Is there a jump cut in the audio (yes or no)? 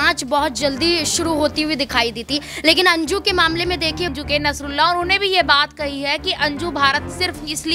yes